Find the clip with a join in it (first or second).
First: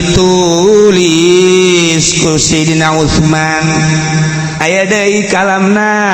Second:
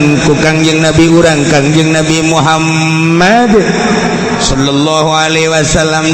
first